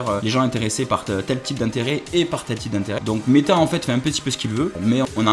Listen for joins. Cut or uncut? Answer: cut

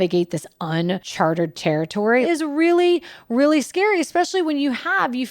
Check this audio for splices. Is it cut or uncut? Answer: cut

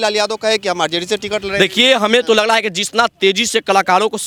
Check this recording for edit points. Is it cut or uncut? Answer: uncut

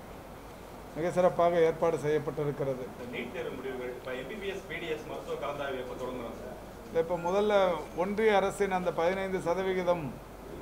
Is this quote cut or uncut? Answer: cut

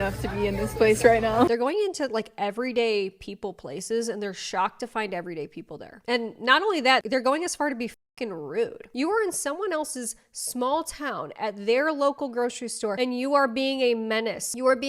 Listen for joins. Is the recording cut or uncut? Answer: cut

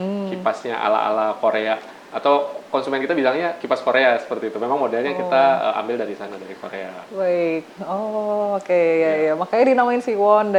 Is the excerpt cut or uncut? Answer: uncut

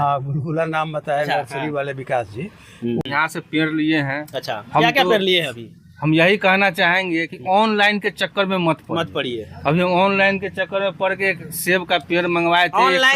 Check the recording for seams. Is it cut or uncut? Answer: cut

